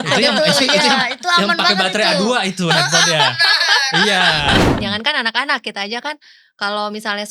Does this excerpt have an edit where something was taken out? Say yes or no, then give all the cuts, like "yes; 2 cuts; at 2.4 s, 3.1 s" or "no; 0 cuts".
yes; 1 cut; at 4.8 s